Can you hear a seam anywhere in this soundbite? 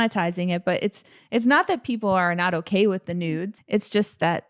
yes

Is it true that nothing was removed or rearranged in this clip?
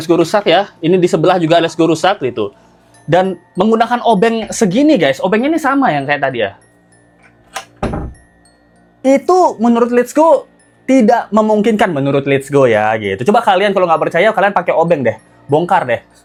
yes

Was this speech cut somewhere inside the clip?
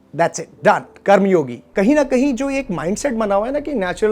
yes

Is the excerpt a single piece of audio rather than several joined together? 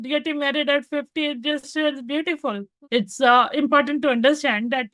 no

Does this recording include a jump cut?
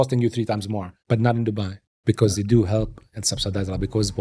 yes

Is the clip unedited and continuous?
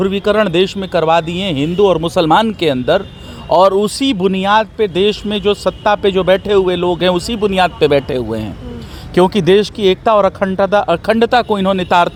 yes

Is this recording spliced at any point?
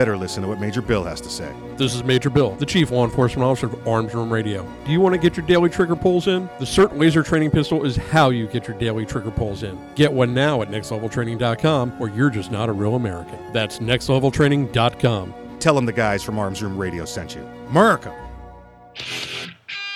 yes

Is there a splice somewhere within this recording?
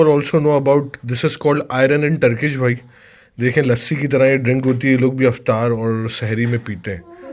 no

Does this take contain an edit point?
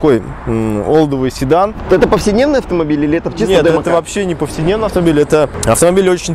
yes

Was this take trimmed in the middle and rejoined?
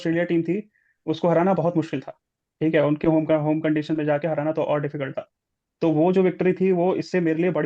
no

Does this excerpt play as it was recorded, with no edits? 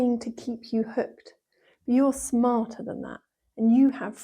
yes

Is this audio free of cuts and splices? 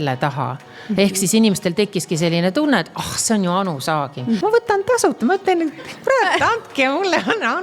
no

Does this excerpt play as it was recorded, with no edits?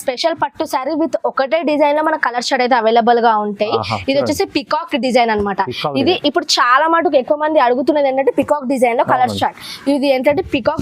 yes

